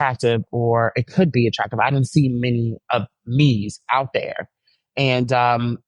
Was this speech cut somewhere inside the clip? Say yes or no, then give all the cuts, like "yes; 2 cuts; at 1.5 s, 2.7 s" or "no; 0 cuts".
no; 0 cuts